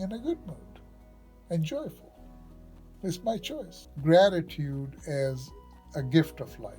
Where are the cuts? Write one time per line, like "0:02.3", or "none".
0:03.8

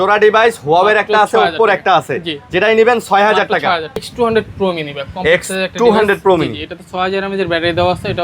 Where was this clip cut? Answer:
0:04.1

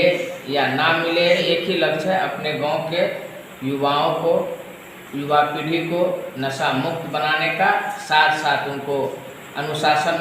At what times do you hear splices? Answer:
0:01.4

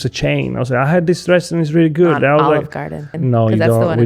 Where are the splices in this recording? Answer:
0:03.1

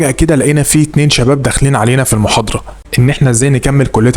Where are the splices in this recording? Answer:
0:02.8

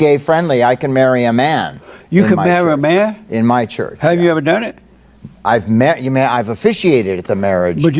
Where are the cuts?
none

